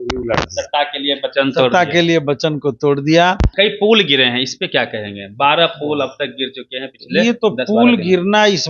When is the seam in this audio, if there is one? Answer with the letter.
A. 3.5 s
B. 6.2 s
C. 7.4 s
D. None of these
A